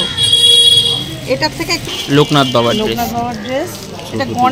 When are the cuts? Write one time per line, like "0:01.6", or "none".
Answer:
0:01.8